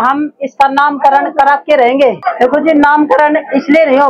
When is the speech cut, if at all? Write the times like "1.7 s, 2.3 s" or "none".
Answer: 2.3 s